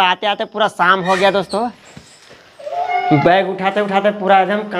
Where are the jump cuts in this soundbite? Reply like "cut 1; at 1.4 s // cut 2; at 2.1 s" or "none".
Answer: cut 1; at 1.8 s

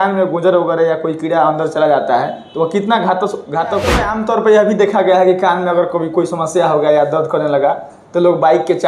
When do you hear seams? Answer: cut 1; at 4.1 s

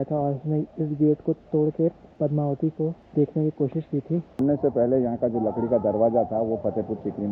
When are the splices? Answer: cut 1; at 2.1 s // cut 2; at 3.0 s // cut 3; at 4.4 s

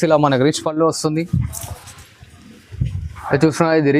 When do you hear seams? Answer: none

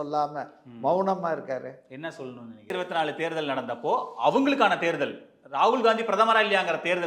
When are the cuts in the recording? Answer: cut 1; at 2.7 s

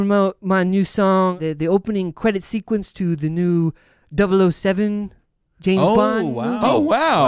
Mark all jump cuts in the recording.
cut 1; at 1.4 s

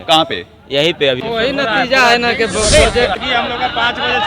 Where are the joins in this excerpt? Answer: cut 1; at 1.2 s // cut 2; at 3.1 s

